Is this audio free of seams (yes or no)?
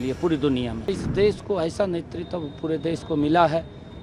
no